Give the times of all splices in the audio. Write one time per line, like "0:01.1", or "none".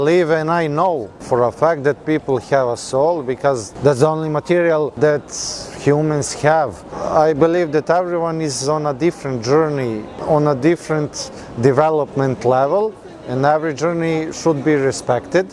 0:01.1
0:03.7
0:04.9
0:07.0
0:10.1